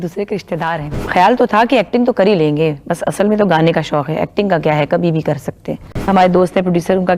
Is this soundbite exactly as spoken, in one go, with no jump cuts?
no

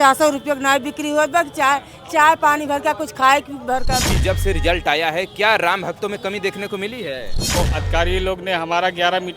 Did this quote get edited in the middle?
yes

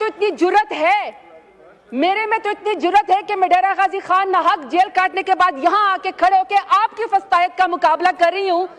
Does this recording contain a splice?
no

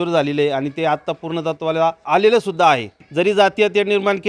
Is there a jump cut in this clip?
yes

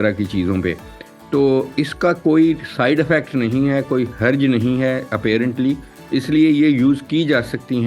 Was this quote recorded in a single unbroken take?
yes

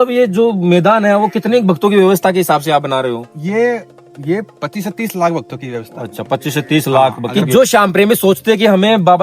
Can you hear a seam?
yes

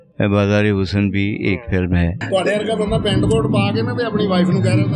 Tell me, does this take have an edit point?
yes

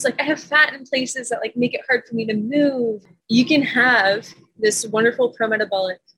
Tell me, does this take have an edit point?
yes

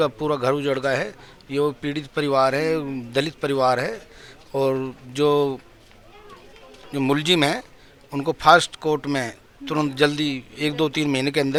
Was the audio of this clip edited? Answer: no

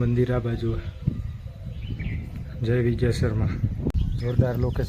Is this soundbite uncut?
no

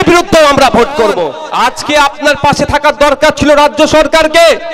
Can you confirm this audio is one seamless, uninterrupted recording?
no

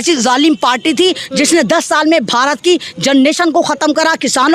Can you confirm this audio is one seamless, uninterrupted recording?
yes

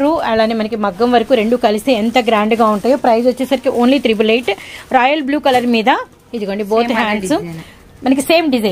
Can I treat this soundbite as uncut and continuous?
yes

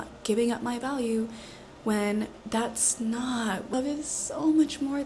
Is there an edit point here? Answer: yes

